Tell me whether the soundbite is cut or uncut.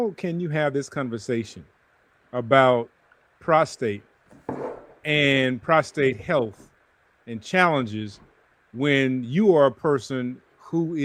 uncut